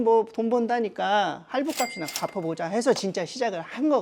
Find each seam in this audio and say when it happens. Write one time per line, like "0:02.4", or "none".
none